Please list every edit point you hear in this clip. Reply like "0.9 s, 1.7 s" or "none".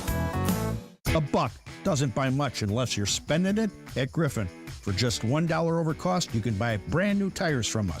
0.9 s